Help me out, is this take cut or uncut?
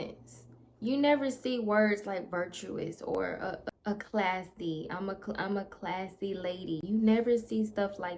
cut